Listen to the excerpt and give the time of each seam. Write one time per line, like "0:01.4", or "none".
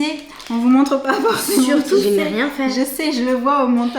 0:02.0